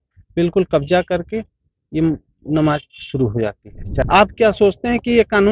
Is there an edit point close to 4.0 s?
yes; 1 cut; at 4.0 s

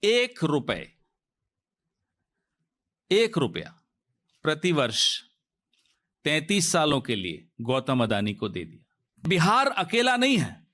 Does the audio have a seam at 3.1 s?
no; 1 cut; at 9.2 s

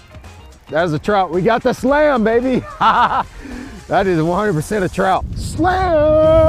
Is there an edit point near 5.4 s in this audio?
yes; 1 cut; at 5.4 s

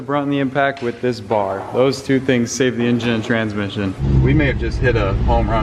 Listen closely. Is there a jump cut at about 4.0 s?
yes; 1 cut; at 4.0 s

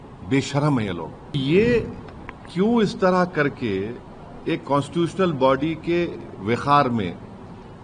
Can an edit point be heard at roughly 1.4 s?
yes; 1 cut; at 1.4 s

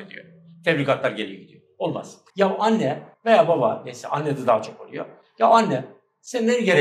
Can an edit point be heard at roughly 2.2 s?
yes; 2 cuts; at 2.2 s, 3.1 s

